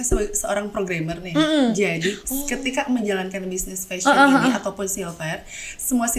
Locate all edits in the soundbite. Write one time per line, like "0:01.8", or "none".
none